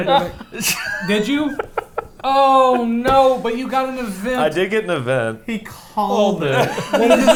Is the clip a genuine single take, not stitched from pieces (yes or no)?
yes